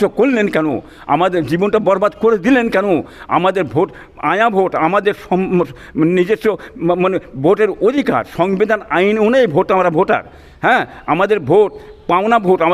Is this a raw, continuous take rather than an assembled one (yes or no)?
yes